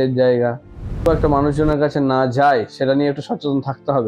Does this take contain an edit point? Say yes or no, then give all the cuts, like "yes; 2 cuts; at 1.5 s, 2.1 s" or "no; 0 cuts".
yes; 1 cut; at 1.0 s